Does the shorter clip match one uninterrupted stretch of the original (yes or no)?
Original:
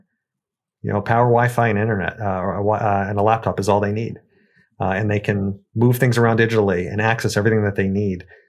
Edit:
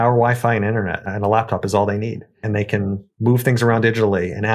no